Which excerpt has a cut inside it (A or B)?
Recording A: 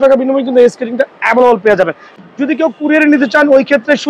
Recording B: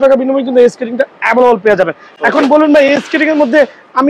A